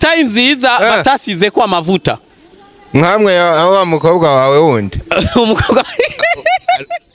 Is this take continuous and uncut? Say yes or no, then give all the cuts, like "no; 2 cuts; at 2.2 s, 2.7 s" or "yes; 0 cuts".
yes; 0 cuts